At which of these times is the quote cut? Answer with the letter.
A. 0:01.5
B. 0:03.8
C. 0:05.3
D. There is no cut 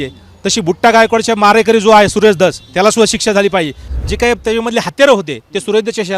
B